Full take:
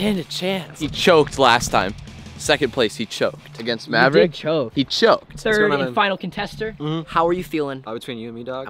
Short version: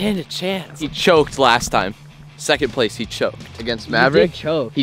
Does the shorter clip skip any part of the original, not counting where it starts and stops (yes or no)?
no